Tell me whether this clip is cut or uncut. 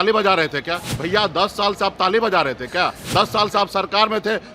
cut